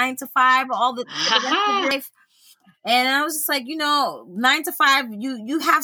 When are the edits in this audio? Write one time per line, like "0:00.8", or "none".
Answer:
0:01.9